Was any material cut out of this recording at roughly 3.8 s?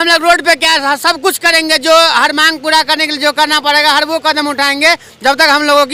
no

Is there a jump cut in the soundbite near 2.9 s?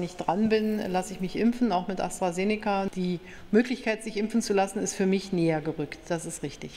yes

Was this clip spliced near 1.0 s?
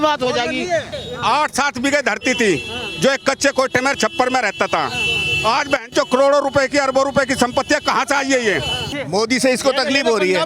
yes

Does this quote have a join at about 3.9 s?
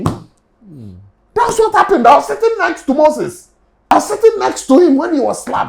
yes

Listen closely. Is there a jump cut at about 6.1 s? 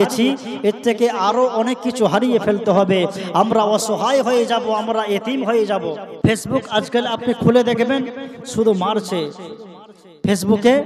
yes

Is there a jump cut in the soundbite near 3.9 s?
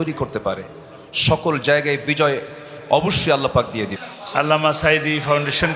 yes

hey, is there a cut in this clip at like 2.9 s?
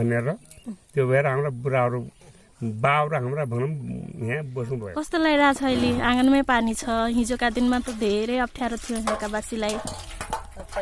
no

